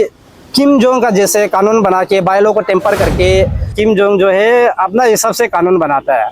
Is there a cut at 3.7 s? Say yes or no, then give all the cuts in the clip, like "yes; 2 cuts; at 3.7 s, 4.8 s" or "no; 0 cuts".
yes; 1 cut; at 3.7 s